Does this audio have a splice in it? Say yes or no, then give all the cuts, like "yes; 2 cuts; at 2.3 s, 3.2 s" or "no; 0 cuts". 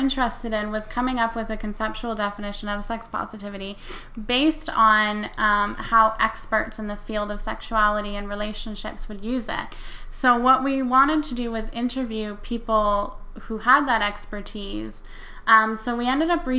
no; 0 cuts